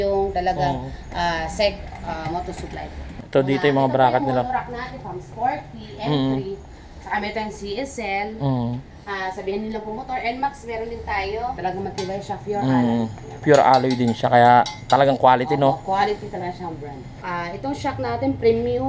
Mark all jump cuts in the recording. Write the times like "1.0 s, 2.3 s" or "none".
3.1 s, 11.6 s, 17.1 s